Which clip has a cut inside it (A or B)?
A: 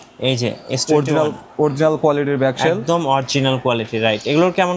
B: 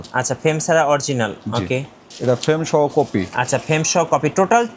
B